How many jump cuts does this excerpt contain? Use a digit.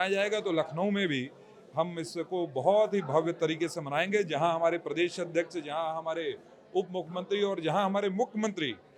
0